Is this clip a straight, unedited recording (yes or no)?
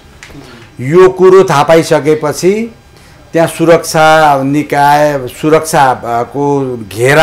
yes